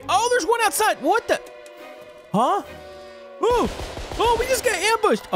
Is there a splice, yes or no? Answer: no